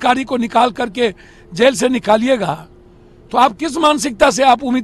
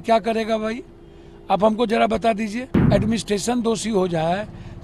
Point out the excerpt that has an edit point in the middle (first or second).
second